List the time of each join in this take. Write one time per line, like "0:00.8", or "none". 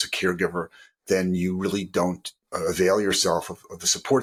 none